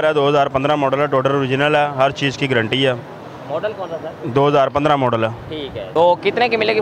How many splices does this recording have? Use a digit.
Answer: 1